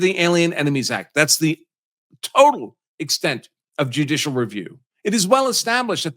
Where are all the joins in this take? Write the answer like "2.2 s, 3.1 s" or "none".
4.8 s